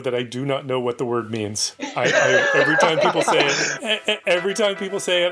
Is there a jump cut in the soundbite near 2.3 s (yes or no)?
no